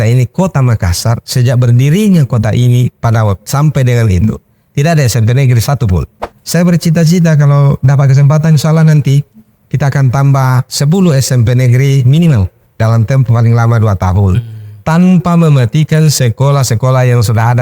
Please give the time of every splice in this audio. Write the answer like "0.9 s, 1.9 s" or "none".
6.2 s